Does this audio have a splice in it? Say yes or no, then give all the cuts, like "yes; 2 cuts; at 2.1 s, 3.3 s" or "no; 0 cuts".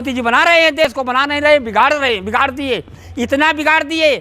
yes; 1 cut; at 0.9 s